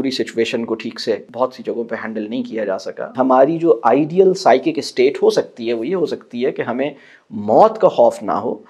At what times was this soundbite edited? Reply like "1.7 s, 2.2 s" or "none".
1.3 s, 3.1 s